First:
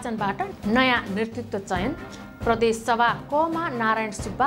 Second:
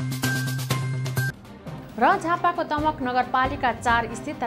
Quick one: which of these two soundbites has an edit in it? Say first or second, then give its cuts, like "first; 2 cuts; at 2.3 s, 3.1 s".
second; 1 cut; at 1.3 s